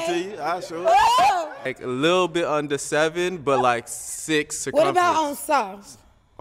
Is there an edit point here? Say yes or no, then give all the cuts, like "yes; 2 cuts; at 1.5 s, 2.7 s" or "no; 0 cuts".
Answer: yes; 1 cut; at 1.7 s